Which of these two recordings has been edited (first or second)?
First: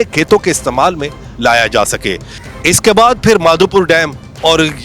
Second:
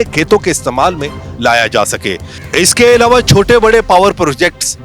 second